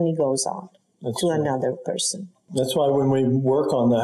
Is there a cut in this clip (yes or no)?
yes